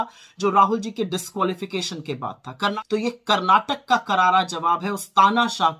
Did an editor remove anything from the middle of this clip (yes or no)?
yes